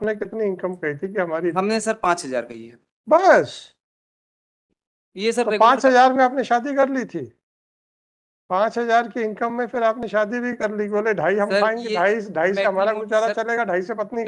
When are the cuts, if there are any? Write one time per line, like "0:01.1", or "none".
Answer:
none